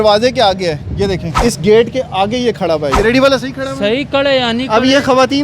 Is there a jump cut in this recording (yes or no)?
yes